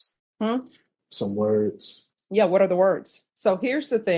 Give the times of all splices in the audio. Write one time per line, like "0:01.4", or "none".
0:03.2